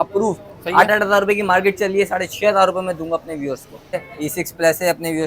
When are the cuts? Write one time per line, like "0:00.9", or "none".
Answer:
0:04.0